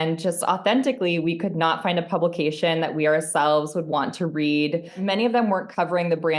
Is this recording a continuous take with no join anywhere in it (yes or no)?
no